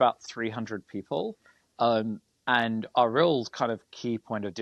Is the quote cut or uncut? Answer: uncut